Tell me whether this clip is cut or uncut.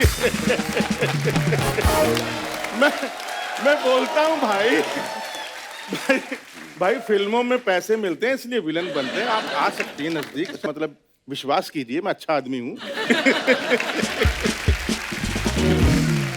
uncut